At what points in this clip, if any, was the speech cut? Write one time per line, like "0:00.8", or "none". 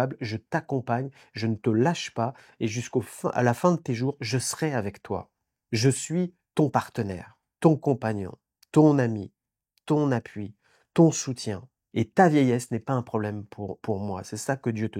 none